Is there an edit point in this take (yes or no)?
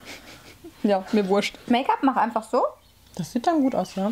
yes